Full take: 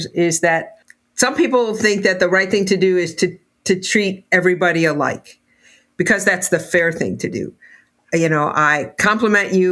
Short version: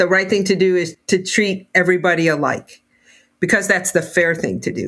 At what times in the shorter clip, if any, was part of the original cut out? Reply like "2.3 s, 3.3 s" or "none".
0.9 s

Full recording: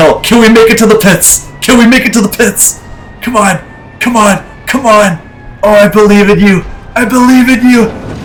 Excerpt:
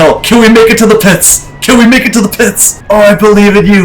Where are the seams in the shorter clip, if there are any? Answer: 2.7 s

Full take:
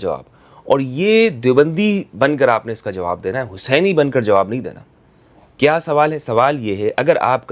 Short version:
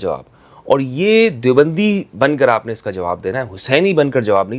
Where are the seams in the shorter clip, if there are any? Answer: none

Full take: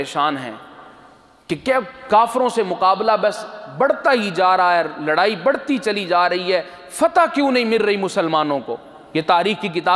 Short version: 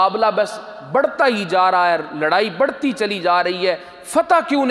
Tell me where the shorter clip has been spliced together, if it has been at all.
none

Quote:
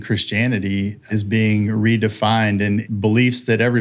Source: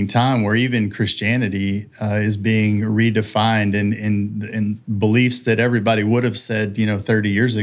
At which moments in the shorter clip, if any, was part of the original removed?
1.1 s, 2.9 s

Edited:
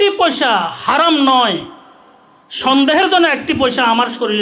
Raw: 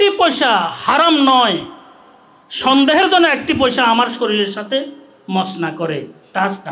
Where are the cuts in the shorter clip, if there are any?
none

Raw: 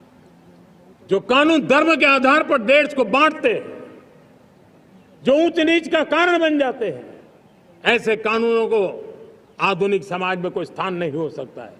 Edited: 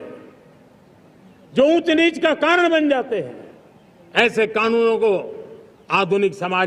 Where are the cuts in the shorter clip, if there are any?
none

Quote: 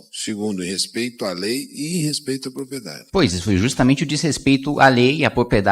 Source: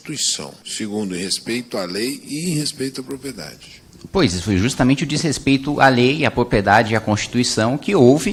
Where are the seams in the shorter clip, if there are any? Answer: 3.0 s

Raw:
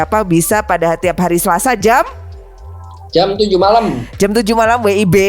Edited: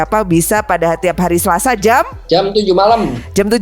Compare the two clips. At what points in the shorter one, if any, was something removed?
2.2 s

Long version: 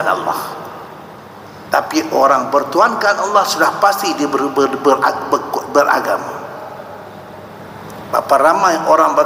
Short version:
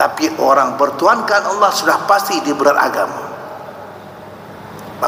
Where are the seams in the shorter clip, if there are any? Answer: 2.6 s

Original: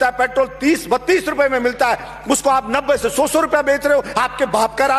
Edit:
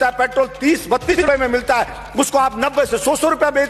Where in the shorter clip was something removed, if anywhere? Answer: 1.1 s

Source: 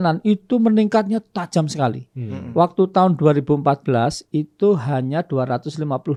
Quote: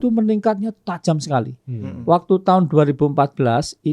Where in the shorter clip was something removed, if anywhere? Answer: none

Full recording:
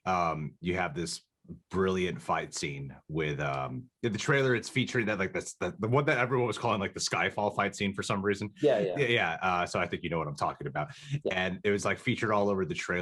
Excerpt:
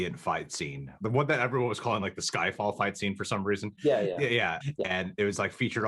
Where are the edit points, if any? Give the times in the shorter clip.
1.0 s, 4.6 s

